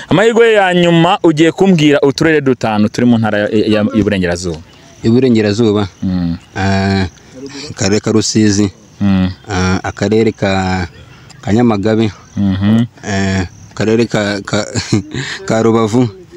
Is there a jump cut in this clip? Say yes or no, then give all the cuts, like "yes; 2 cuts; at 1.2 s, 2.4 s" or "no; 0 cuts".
no; 0 cuts